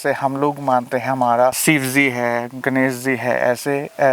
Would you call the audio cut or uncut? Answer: cut